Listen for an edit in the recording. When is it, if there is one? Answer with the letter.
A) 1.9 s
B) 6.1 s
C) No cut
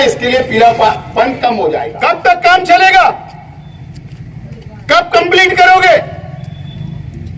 A